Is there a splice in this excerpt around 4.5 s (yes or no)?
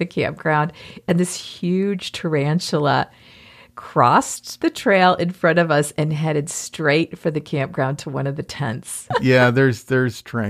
no